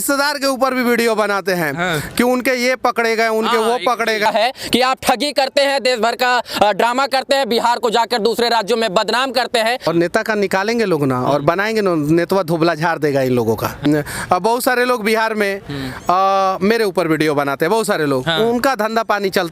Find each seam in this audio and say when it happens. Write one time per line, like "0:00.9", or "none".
0:04.2
0:09.9
0:13.9